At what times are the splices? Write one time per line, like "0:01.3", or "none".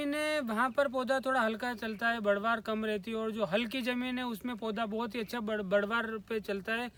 none